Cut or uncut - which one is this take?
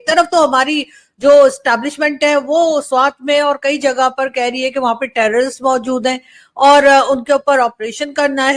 uncut